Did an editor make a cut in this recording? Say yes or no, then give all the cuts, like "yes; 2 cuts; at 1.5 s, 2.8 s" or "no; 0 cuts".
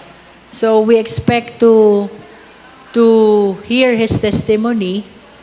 no; 0 cuts